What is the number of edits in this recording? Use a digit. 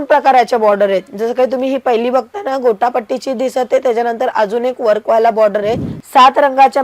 1